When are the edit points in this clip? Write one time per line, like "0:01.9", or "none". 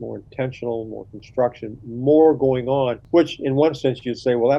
0:03.0

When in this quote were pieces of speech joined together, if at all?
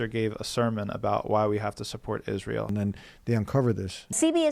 0:02.7

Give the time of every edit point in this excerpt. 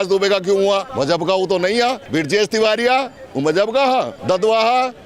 0:00.9
0:02.0
0:04.1

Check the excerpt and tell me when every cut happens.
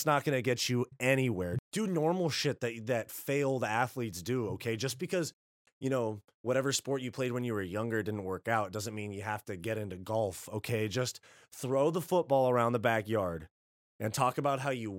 0:01.6

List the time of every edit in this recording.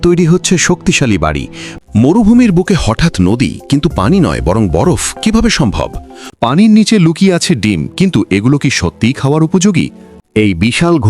0:01.7
0:06.2
0:10.1

